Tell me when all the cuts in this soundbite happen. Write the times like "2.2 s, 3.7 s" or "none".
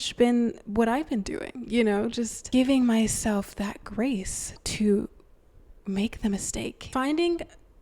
6.9 s